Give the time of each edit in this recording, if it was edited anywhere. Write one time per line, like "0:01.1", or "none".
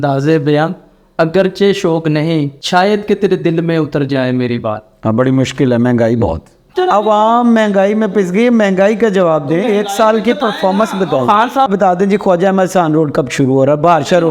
0:02.6
0:06.7
0:11.7